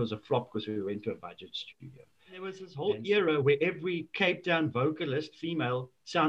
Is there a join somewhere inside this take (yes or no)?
yes